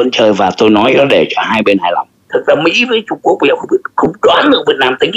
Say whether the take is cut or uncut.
cut